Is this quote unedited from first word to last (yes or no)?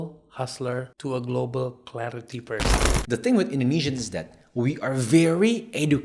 no